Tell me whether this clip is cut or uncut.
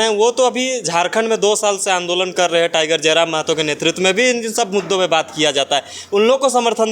uncut